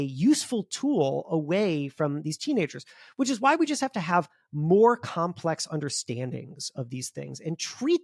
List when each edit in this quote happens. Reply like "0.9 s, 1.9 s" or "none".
none